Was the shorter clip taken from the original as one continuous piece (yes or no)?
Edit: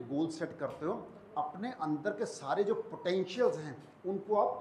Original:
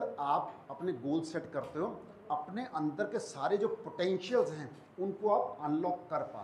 yes